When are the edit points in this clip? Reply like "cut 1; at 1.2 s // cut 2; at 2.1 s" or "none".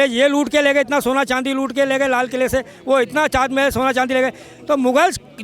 none